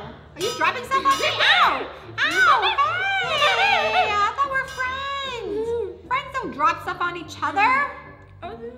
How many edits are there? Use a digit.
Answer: 1